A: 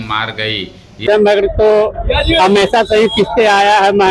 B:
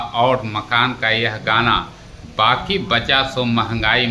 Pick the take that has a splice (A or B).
A